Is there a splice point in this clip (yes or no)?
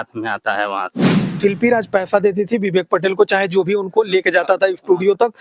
yes